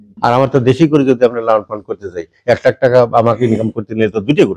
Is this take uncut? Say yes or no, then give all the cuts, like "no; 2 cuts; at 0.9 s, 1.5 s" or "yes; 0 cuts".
yes; 0 cuts